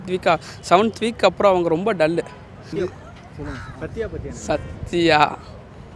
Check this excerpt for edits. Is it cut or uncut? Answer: cut